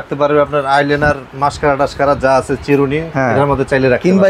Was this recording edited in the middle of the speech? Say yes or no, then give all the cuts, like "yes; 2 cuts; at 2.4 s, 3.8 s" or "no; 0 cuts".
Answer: yes; 1 cut; at 3.1 s